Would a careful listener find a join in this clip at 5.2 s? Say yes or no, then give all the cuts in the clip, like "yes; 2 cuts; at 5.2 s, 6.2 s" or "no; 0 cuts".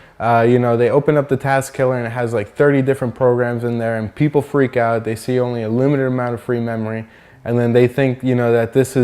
yes; 1 cut; at 5.2 s